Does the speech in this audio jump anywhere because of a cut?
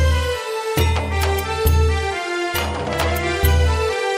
no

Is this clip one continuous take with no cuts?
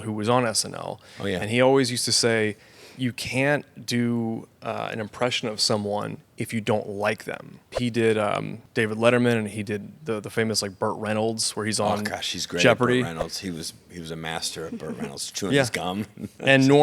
no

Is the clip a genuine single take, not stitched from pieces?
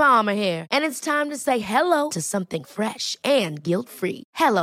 yes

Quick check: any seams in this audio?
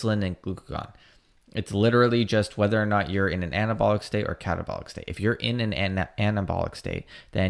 no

